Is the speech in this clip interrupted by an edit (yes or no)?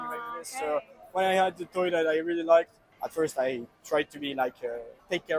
no